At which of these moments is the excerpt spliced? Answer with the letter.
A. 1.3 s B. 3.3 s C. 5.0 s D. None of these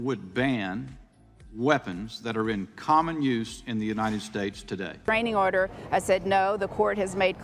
C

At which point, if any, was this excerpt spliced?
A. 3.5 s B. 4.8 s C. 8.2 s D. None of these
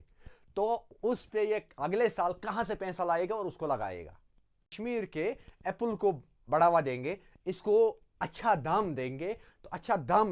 B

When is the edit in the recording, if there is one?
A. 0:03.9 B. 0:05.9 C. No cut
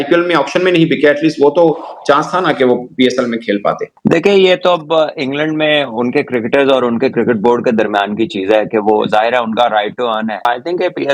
C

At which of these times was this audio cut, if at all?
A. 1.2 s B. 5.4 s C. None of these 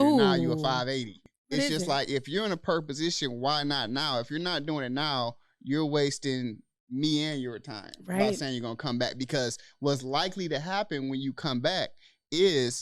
A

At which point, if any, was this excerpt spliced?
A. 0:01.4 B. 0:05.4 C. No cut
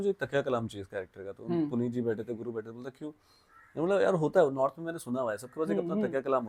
C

